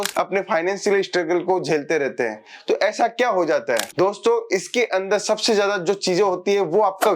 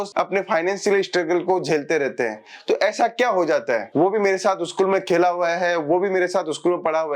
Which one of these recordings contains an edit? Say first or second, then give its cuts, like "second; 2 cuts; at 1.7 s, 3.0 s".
second; 1 cut; at 3.9 s